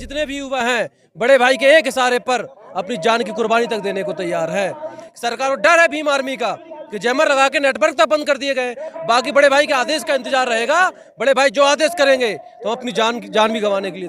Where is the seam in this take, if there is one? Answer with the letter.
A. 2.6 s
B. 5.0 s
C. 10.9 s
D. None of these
B